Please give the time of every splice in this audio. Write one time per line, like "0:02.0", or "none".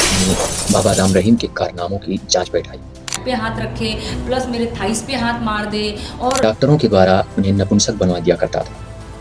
0:03.1
0:06.4

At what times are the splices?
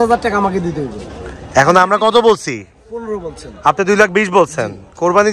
none

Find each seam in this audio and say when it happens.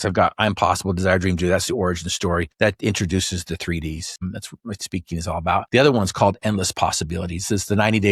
0:02.5
0:04.1
0:05.7

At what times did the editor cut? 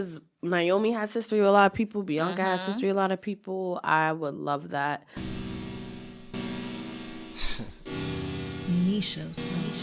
0:05.1

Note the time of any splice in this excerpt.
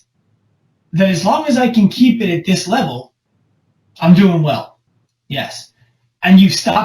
0:04.8

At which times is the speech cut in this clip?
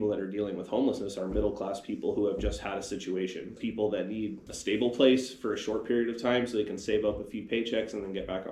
0:03.6
0:04.5

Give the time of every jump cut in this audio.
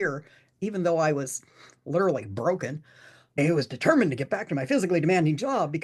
0:03.4

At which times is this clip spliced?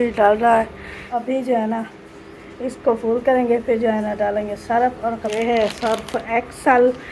0:01.0
0:05.3

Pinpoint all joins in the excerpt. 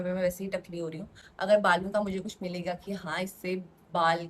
none

